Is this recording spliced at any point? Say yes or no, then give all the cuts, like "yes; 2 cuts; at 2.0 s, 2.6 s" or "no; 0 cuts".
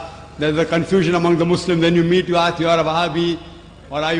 no; 0 cuts